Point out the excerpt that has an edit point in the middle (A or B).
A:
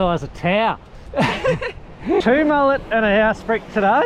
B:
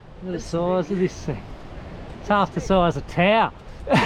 A